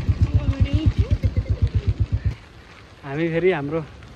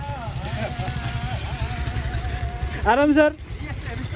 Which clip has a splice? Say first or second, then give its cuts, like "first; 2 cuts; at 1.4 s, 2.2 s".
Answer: first; 1 cut; at 2.3 s